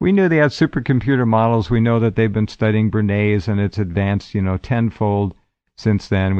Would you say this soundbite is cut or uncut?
cut